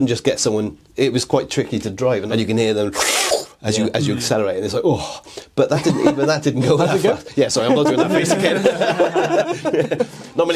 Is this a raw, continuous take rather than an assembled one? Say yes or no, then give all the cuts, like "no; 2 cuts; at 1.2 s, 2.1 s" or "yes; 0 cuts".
no; 1 cut; at 2.2 s